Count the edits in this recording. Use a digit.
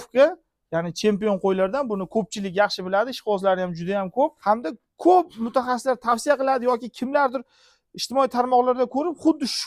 1